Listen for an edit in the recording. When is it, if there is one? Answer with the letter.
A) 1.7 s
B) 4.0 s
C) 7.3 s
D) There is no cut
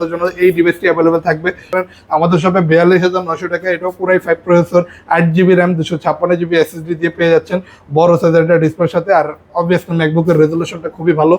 A